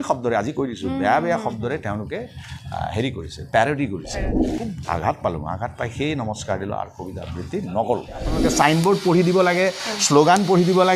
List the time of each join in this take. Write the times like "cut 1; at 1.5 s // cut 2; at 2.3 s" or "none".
cut 1; at 4.4 s // cut 2; at 8.4 s